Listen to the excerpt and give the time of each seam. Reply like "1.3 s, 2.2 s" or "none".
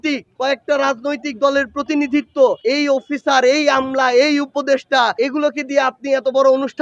5.1 s